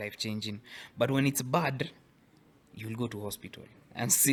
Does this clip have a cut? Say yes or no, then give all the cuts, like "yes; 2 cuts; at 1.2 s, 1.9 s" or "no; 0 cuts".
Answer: no; 0 cuts